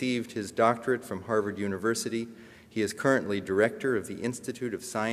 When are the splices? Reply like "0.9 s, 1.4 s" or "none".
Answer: 1.5 s